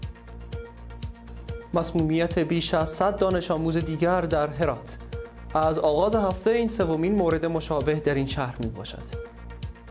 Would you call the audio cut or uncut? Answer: cut